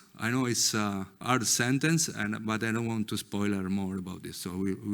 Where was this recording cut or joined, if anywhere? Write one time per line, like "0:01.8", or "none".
0:01.2